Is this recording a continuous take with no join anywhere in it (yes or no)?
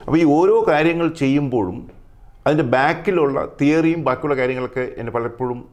yes